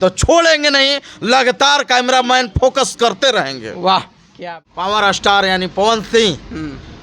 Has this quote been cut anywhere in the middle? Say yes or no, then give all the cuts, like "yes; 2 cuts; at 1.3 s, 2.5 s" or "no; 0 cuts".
yes; 1 cut; at 4.4 s